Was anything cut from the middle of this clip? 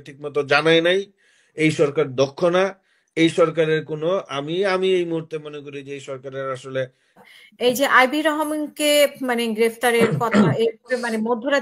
no; 0 cuts

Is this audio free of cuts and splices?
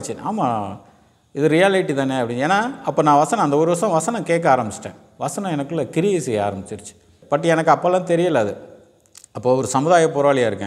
no; 1 cut; at 7.1 s

